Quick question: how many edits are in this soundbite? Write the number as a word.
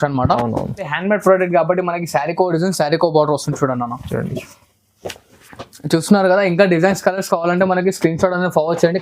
one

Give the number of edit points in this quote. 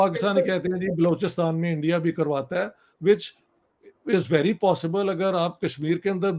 zero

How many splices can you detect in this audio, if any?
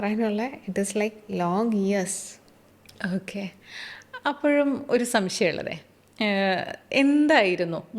zero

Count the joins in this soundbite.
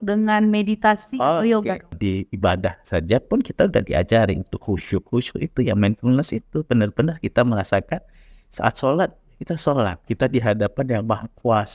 one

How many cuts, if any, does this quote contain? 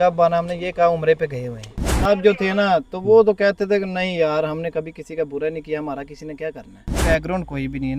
two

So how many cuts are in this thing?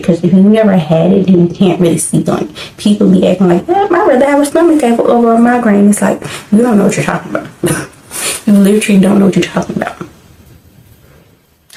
zero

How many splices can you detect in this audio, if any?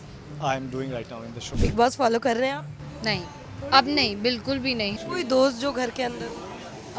two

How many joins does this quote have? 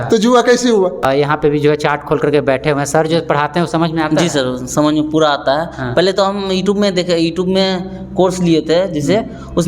one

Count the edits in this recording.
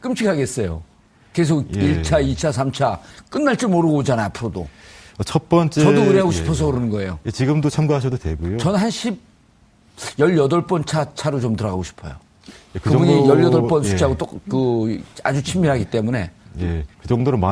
one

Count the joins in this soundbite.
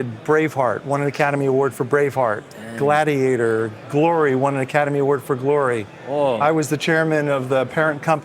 one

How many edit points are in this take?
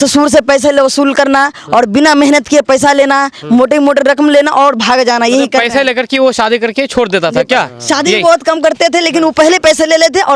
zero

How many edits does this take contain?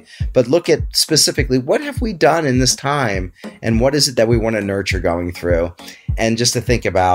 one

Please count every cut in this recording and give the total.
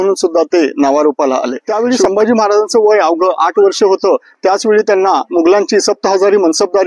one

